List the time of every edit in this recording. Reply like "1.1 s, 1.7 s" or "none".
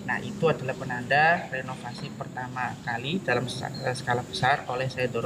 none

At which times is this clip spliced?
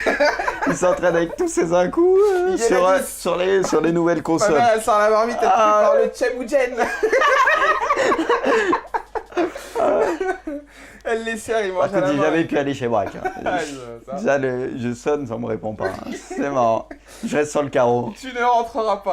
3.6 s

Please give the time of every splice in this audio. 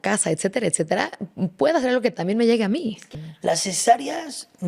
3.0 s

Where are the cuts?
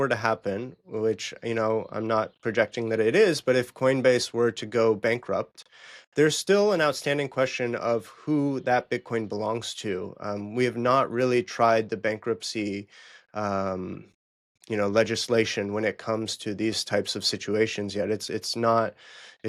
none

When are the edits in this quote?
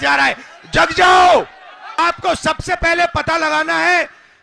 2.0 s

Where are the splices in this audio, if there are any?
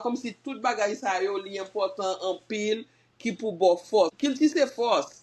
4.1 s

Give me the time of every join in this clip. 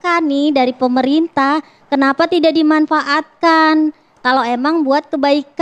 none

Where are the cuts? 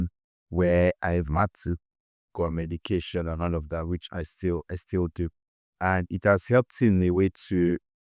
none

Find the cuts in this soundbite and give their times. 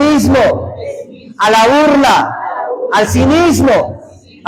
none

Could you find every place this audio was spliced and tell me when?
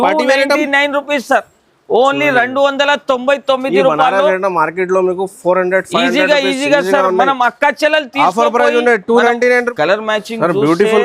9.7 s

